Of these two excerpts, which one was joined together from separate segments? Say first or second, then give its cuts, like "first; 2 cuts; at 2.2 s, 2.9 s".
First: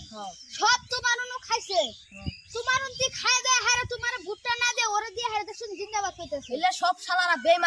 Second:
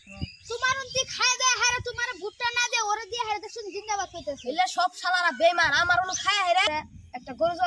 second; 1 cut; at 6.7 s